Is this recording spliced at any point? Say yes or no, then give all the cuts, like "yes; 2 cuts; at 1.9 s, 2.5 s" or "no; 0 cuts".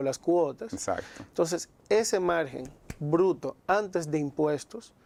no; 0 cuts